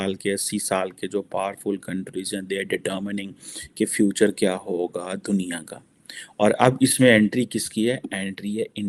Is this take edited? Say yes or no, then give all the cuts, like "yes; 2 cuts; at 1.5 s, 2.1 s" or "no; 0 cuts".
no; 0 cuts